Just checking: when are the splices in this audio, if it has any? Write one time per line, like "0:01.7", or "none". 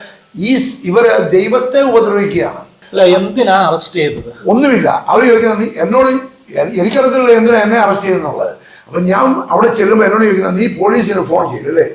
0:02.8